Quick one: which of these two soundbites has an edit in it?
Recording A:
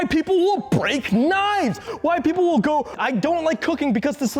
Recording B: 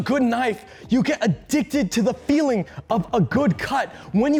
A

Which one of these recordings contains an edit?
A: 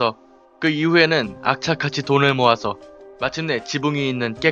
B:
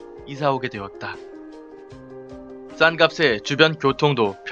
A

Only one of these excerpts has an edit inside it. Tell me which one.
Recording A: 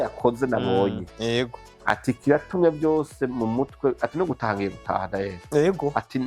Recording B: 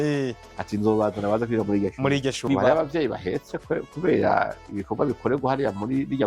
B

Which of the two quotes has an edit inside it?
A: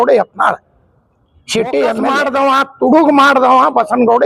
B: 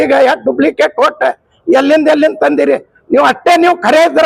A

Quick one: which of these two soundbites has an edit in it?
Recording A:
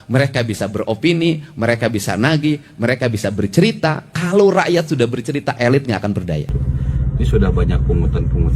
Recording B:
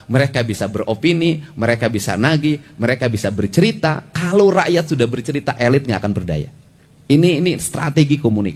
A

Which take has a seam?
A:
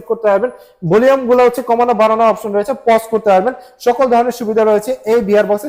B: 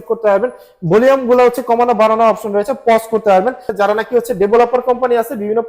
B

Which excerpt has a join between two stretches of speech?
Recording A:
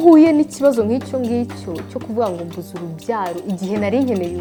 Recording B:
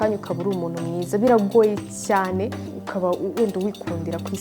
B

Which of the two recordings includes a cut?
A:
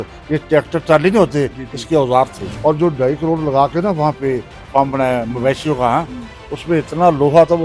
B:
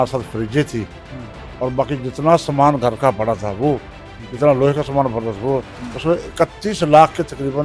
A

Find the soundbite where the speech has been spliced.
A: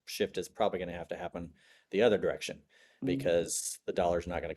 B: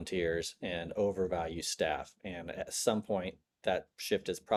A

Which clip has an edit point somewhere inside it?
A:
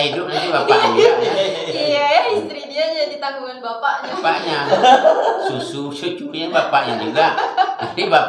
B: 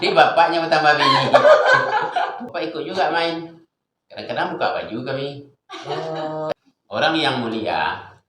B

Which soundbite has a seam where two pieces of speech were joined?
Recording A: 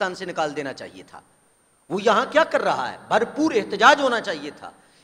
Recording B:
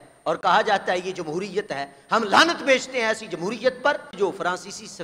B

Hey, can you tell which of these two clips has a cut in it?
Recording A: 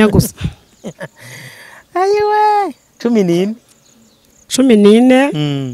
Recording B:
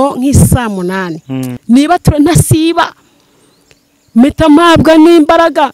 B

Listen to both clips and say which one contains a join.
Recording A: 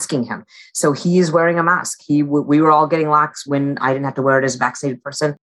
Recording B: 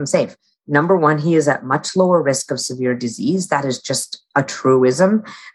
A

